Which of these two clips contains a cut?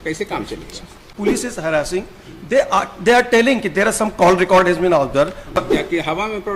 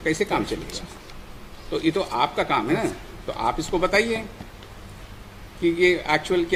first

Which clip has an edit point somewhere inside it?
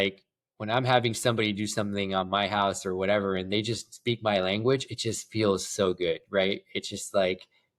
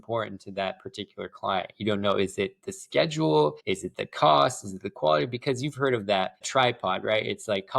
second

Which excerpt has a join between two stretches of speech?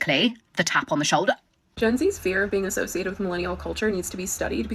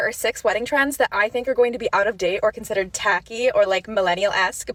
first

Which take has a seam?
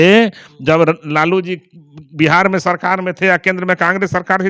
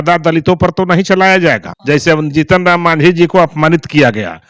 second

